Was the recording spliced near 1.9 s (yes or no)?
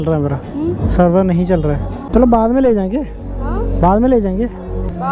yes